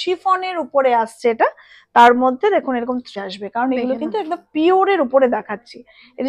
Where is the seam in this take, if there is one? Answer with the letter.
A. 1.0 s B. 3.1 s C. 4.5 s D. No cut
B